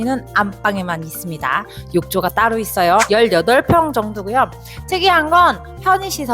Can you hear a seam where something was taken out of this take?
yes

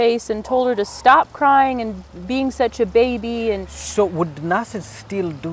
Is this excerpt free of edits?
yes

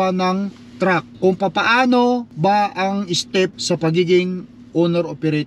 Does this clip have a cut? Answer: yes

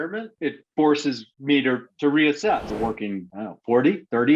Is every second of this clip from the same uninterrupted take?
no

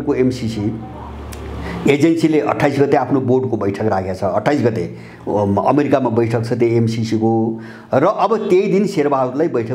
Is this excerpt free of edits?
yes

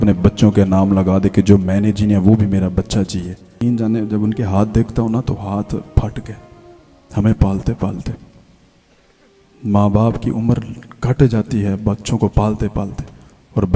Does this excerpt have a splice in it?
yes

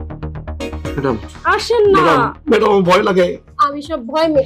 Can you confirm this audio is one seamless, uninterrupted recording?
yes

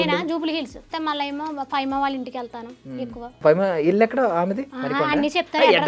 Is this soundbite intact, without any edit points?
no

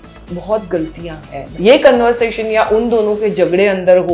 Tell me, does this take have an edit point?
yes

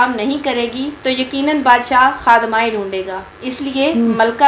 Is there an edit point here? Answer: no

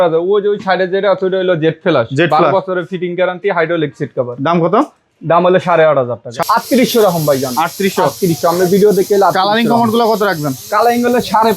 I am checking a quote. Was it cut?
yes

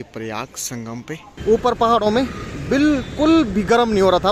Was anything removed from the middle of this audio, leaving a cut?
yes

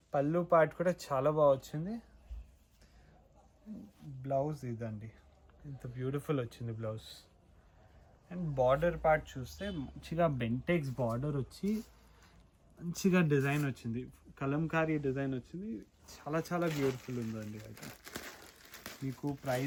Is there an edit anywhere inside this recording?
no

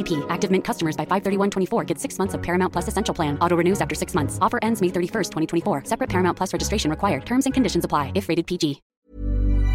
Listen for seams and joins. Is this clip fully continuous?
no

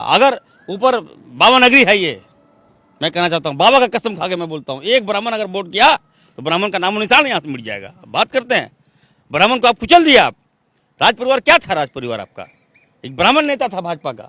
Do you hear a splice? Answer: no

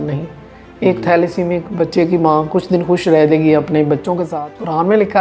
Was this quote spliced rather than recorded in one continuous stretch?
yes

